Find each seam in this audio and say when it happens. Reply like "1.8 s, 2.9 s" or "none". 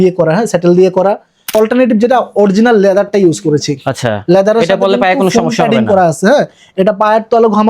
1.4 s